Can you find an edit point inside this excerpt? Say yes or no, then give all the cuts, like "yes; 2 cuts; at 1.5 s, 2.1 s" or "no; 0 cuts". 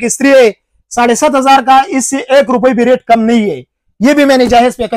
no; 0 cuts